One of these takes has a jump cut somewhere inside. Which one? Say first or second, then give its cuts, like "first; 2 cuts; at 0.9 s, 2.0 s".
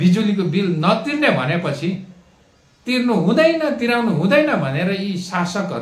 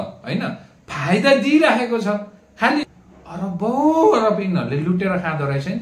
second; 1 cut; at 2.8 s